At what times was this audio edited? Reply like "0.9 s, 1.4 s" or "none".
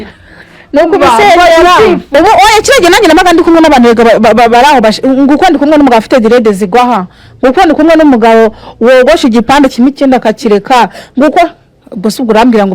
2.0 s